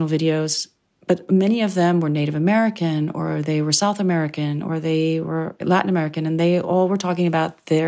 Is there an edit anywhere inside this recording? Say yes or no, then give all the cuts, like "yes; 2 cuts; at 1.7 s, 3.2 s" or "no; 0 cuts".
yes; 2 cuts; at 1.2 s, 5.6 s